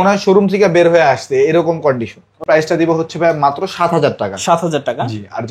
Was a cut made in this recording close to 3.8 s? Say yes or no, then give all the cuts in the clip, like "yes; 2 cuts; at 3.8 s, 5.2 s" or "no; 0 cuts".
no; 1 cut; at 2.4 s